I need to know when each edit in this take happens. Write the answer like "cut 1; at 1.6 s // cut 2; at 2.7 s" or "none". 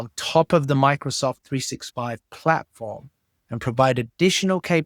none